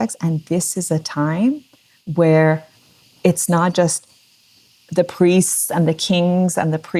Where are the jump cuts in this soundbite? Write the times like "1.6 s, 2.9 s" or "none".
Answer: none